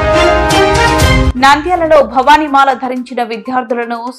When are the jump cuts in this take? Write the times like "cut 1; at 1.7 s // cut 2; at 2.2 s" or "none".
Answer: none